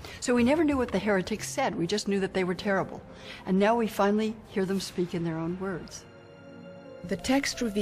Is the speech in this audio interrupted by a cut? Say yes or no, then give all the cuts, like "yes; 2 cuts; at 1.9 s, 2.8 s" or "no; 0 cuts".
yes; 1 cut; at 1.7 s